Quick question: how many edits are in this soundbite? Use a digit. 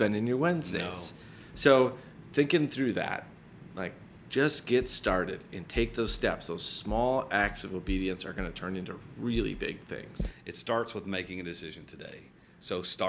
1